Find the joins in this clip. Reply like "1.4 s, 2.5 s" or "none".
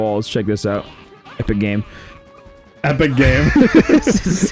none